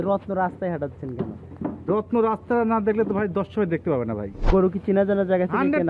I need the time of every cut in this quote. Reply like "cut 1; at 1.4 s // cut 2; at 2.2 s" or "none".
cut 1; at 4.3 s